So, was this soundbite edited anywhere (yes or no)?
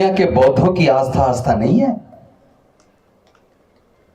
no